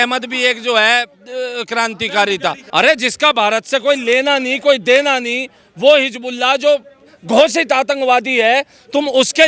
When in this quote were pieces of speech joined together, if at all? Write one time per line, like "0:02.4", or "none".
0:02.6

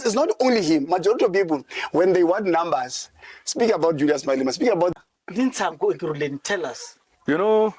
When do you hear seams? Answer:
0:04.9

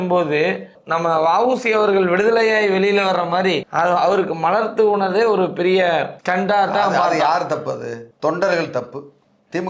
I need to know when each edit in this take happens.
none

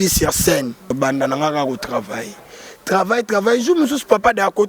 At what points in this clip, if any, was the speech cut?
0:01.0

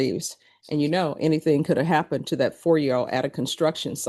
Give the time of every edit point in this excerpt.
none

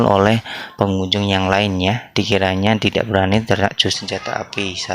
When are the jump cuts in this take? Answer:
0:04.0

